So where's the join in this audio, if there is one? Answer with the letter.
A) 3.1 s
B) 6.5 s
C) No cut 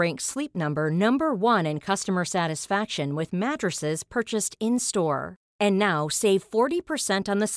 C